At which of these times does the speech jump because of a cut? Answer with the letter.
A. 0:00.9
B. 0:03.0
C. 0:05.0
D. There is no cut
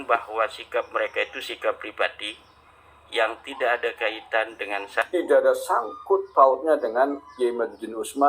C